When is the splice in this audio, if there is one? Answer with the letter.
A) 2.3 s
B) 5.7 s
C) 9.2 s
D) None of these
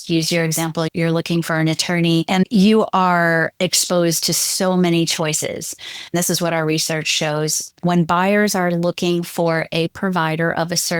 A